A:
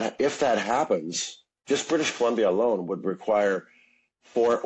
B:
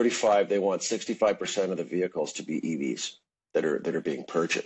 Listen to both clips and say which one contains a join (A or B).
A